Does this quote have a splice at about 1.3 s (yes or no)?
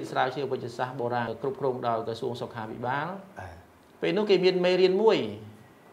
yes